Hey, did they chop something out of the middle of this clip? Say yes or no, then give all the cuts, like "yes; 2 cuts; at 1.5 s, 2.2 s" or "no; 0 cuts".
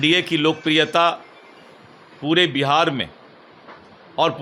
no; 0 cuts